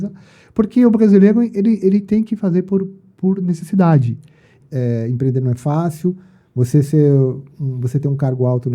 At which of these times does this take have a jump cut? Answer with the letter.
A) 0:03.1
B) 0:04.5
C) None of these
B